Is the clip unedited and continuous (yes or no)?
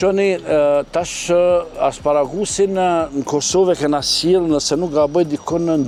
yes